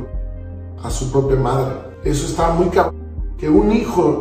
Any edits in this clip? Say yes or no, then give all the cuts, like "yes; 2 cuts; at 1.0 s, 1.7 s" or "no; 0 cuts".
yes; 1 cut; at 1.9 s